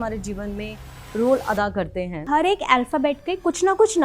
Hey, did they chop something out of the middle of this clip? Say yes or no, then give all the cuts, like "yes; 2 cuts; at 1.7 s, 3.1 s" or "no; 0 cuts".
yes; 1 cut; at 2.3 s